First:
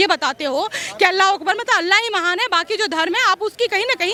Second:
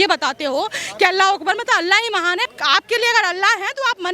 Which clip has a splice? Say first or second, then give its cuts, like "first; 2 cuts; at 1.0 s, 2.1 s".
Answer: second; 1 cut; at 2.5 s